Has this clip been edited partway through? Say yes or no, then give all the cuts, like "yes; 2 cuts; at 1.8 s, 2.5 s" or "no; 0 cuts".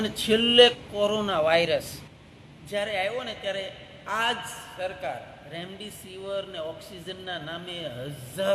no; 0 cuts